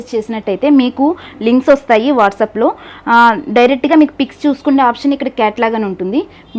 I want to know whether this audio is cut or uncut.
uncut